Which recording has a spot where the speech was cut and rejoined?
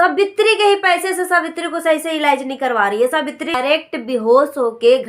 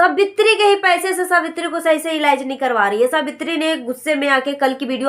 first; 1 cut; at 3.6 s

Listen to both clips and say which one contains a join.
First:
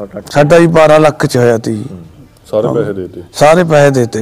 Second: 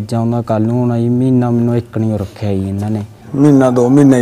second; 1 cut; at 3.2 s

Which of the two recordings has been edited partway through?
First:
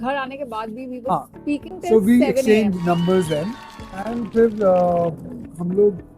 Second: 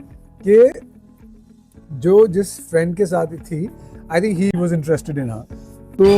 second; 1 cut; at 4.5 s

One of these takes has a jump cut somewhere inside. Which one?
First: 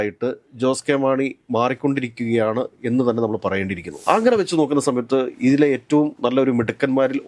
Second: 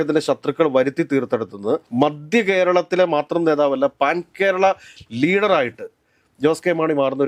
first; 1 cut; at 4.0 s

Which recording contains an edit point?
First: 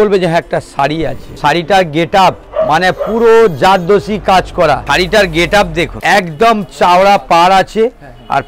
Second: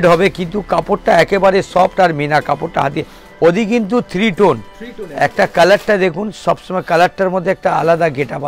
first; 4 cuts; at 1.2 s, 2.4 s, 4.8 s, 5.9 s

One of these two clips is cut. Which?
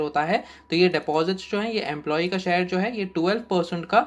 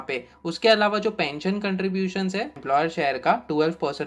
second; 1 cut; at 2.5 s

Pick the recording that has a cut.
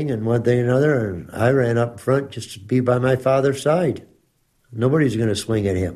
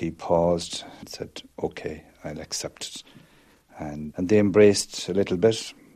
second; 2 cuts; at 1.1 s, 4.1 s

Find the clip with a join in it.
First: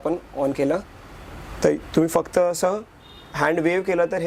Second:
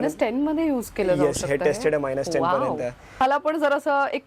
second; 1 cut; at 3.2 s

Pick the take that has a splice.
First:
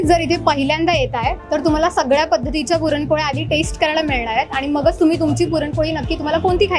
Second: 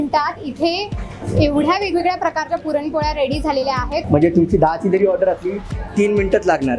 second; 1 cut; at 4.1 s

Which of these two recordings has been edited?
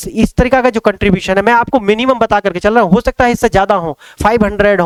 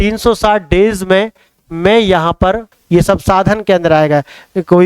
second; 1 cut; at 2.7 s

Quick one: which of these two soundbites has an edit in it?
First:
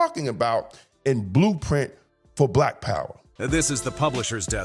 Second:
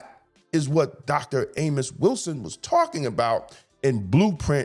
first; 1 cut; at 3.2 s

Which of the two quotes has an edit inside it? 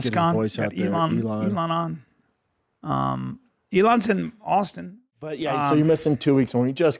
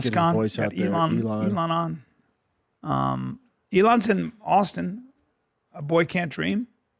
first; 1 cut; at 5.4 s

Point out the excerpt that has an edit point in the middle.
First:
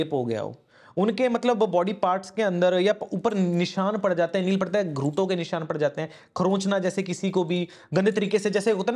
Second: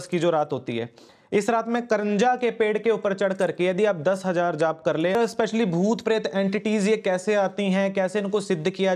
second; 1 cut; at 5.2 s

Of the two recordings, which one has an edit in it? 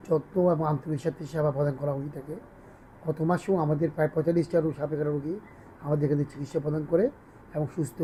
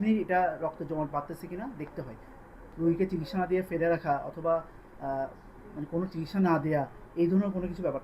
second; 1 cut; at 2.5 s

